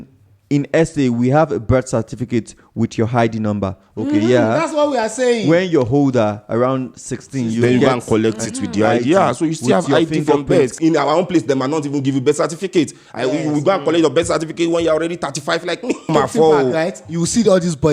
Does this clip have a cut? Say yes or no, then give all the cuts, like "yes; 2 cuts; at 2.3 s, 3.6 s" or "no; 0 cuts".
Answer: yes; 2 cuts; at 10.8 s, 16.1 s